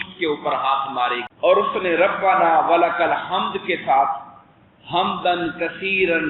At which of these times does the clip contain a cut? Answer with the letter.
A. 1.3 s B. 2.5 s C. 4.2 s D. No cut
A